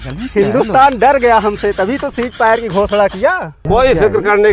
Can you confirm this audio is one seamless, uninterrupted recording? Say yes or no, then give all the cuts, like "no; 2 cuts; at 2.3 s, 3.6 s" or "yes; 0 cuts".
no; 1 cut; at 3.5 s